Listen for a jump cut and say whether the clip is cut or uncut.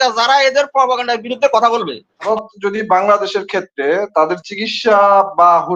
cut